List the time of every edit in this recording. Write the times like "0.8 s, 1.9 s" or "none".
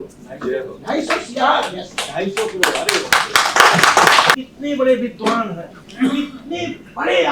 4.3 s